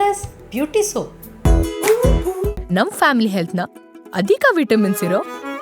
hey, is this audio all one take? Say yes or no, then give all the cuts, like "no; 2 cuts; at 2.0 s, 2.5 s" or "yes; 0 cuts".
no; 1 cut; at 1.2 s